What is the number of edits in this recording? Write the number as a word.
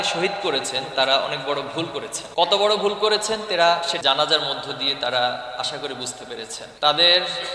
two